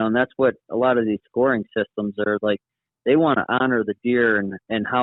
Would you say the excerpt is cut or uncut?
uncut